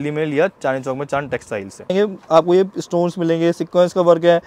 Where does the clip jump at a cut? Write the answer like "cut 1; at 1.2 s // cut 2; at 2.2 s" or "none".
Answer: cut 1; at 1.9 s